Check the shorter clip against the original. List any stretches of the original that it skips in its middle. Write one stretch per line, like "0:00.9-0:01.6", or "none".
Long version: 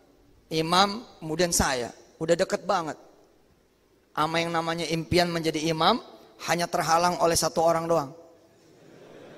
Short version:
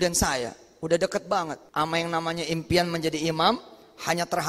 0:03.0-0:04.0